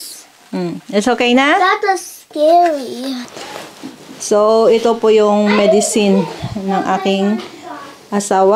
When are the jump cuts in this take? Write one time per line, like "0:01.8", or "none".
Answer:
0:03.3